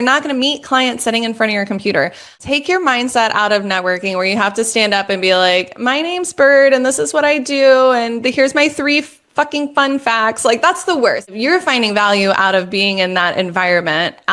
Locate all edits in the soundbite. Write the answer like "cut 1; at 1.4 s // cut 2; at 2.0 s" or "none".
cut 1; at 2.4 s // cut 2; at 11.3 s